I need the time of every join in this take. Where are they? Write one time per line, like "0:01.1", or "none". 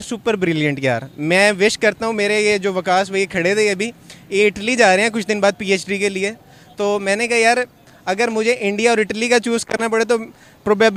none